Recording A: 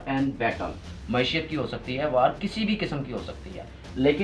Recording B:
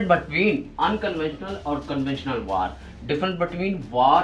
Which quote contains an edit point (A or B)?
A